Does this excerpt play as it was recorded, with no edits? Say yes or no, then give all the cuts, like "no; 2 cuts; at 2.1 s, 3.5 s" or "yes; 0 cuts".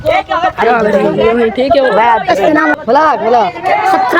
no; 1 cut; at 2.7 s